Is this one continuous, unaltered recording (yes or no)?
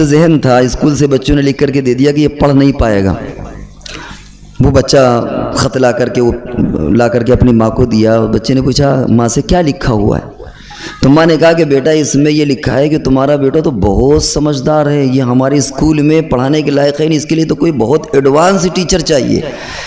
yes